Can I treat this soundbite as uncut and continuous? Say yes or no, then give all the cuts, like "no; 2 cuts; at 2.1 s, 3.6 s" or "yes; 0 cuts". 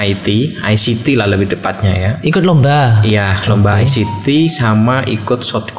yes; 0 cuts